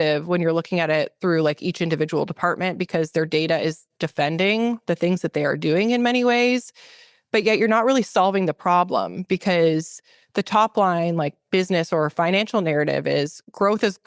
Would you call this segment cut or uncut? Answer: uncut